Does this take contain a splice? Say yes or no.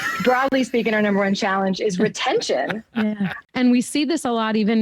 yes